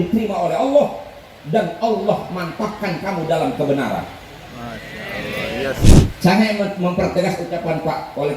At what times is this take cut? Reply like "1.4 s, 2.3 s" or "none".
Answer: 5.8 s